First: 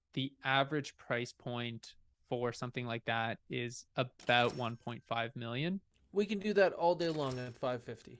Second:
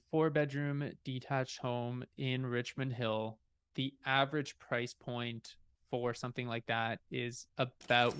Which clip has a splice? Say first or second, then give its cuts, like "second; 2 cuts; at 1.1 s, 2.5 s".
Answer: first; 1 cut; at 6.0 s